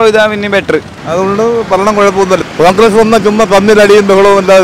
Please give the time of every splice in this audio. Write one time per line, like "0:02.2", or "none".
0:01.0
0:02.4

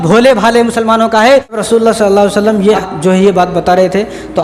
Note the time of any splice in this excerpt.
0:01.6
0:02.8

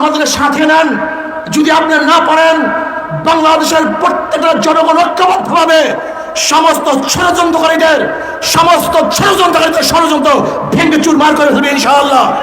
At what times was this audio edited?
none

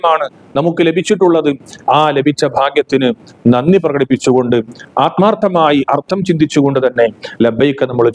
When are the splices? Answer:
none

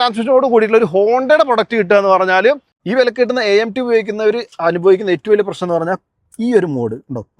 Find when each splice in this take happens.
0:02.8

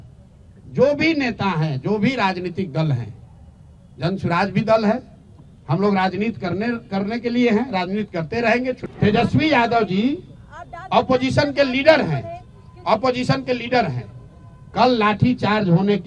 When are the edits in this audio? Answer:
0:08.8

